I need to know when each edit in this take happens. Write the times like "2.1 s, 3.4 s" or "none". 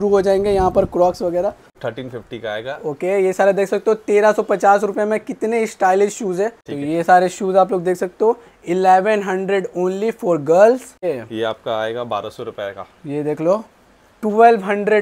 1.7 s, 6.7 s, 11.0 s